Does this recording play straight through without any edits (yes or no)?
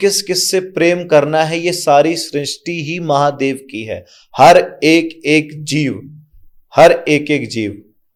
yes